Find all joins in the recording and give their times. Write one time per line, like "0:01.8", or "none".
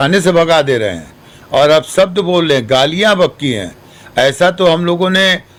none